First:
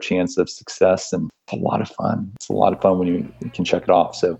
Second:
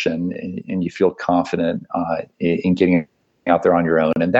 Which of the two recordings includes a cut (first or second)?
first